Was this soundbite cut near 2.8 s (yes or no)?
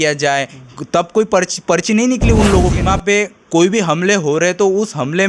yes